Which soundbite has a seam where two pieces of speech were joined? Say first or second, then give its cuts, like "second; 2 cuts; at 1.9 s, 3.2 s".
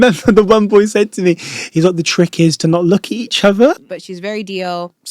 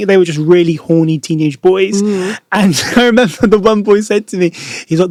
first; 1 cut; at 3.7 s